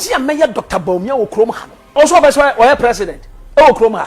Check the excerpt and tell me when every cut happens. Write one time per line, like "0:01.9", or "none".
0:01.9